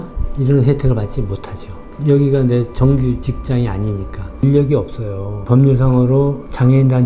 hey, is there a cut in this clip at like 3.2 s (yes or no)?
yes